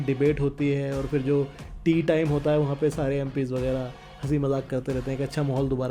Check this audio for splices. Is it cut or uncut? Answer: uncut